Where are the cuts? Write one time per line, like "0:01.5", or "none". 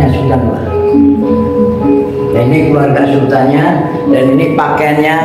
none

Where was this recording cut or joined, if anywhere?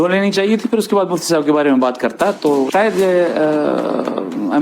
0:02.7

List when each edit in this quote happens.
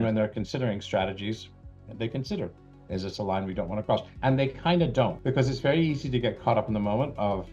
0:04.1
0:05.2

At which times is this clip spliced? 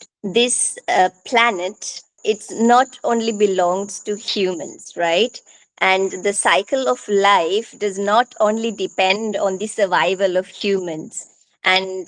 0:02.1

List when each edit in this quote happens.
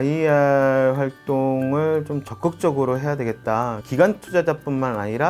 0:03.8

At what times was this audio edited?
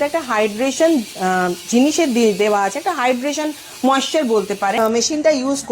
0:04.8

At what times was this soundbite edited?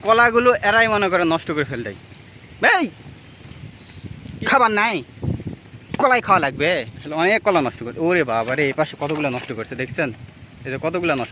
0:04.2
0:07.0

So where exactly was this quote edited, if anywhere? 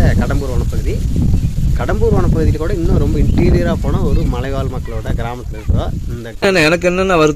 0:06.4

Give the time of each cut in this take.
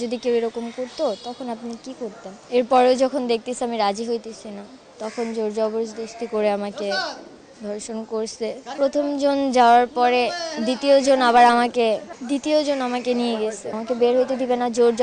0:02.3
0:08.7
0:13.7

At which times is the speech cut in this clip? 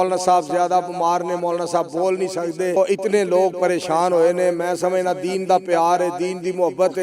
0:02.8

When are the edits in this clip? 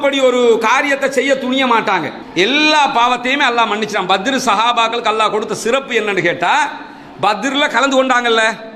0:02.2

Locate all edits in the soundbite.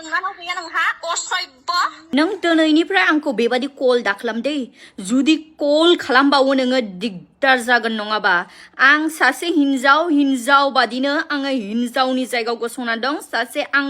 0:02.0

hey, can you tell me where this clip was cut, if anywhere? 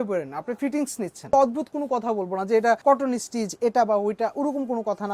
0:01.3
0:02.8

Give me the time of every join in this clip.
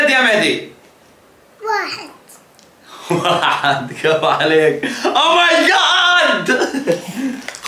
none

